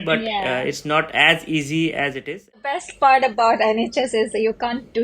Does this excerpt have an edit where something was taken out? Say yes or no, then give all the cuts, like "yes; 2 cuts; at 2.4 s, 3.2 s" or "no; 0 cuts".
yes; 1 cut; at 2.8 s